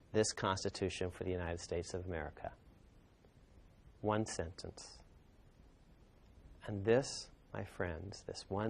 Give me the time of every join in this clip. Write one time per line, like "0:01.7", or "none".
none